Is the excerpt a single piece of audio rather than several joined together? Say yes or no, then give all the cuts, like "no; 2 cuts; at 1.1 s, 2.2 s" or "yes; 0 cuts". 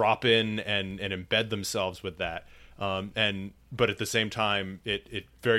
yes; 0 cuts